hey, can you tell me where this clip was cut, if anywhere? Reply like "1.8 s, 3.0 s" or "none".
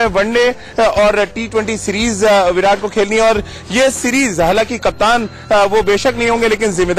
1.2 s